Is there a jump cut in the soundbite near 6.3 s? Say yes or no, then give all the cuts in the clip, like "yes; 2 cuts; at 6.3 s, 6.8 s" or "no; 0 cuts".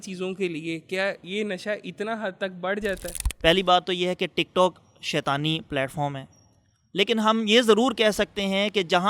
no; 2 cuts; at 1.2 s, 3.1 s